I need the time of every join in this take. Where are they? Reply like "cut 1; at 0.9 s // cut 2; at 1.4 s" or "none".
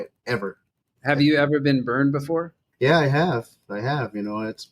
cut 1; at 0.9 s // cut 2; at 2.6 s